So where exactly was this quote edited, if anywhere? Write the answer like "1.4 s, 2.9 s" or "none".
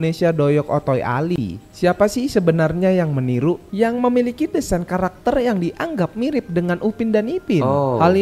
3.6 s